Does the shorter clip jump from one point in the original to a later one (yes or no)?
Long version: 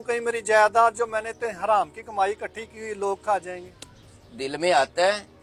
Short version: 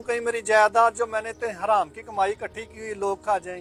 no